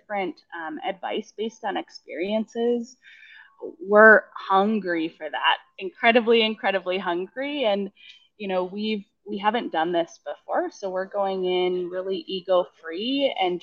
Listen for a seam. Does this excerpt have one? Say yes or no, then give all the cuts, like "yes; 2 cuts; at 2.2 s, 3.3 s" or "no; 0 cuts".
no; 0 cuts